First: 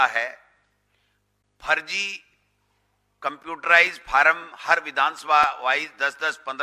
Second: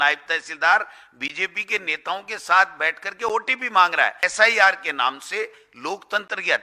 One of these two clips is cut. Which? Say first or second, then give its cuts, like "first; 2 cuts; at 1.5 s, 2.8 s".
second; 1 cut; at 4.2 s